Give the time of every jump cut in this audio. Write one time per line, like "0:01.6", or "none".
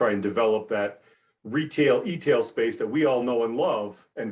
none